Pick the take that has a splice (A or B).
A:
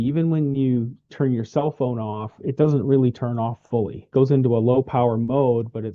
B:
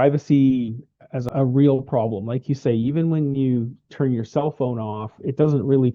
B